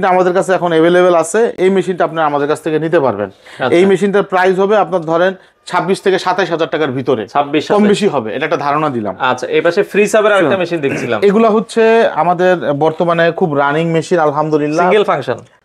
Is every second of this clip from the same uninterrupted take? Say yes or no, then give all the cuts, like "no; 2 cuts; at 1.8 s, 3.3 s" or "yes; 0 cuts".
yes; 0 cuts